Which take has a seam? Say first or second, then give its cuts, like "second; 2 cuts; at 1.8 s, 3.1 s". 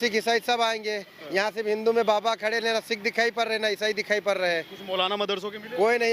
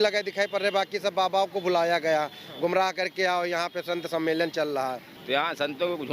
second; 1 cut; at 5.1 s